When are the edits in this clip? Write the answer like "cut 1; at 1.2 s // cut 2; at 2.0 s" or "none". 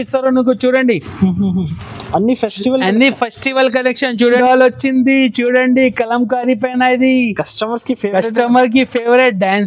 cut 1; at 4.4 s